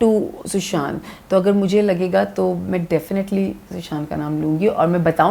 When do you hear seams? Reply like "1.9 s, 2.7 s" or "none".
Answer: none